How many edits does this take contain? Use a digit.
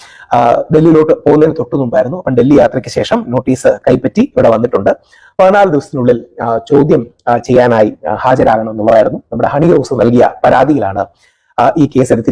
0